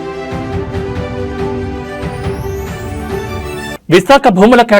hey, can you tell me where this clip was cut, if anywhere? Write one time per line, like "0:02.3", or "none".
0:03.7